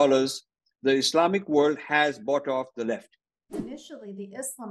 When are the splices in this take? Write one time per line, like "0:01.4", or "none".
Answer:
0:03.6